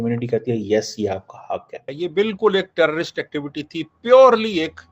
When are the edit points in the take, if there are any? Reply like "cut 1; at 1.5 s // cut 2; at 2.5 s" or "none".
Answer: cut 1; at 1.8 s

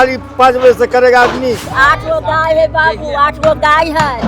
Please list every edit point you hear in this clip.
cut 1; at 1.7 s

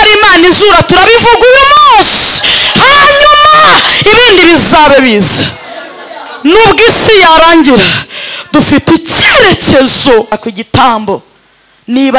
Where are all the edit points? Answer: cut 1; at 10.3 s

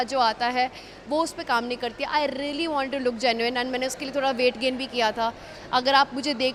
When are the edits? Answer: none

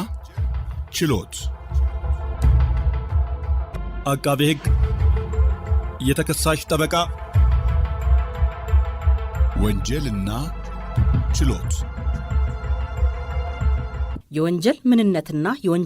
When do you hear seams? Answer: cut 1; at 1.4 s

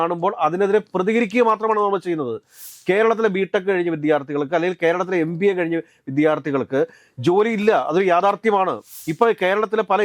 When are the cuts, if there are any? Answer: cut 1; at 8.9 s

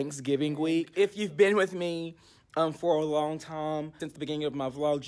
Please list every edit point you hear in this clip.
cut 1; at 0.9 s // cut 2; at 4.0 s

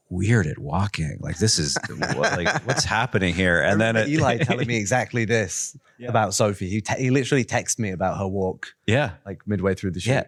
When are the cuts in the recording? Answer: none

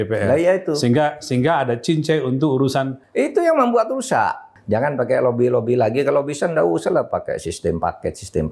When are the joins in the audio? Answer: cut 1; at 3.0 s // cut 2; at 4.5 s

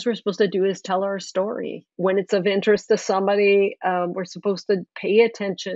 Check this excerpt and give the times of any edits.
cut 1; at 1.8 s

